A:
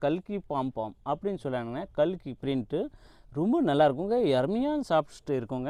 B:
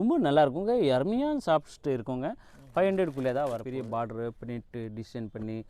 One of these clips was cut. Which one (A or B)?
B